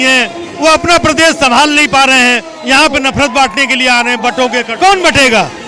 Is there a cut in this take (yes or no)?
yes